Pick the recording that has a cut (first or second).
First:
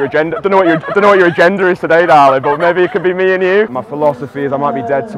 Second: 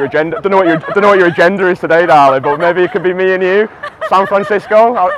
first